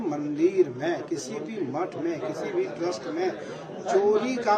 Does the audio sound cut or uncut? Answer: uncut